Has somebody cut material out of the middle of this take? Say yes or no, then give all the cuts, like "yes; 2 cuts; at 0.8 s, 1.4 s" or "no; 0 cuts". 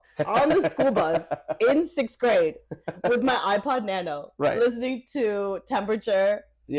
no; 0 cuts